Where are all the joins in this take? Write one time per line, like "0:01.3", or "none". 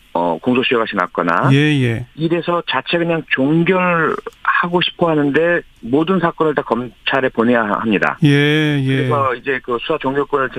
0:02.1